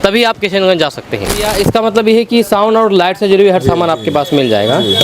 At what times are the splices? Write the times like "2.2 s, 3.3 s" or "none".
1.3 s